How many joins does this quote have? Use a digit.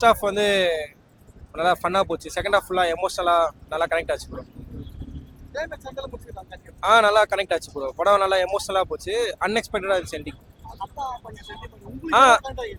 0